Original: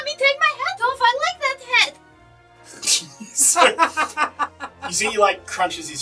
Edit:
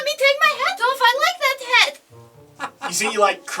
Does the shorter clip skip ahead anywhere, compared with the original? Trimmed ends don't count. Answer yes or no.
yes